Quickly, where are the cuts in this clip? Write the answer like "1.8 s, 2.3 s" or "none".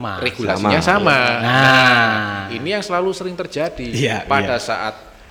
none